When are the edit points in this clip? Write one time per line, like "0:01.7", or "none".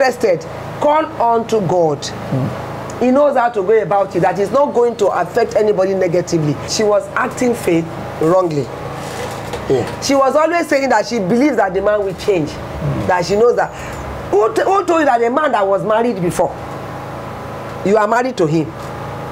0:06.7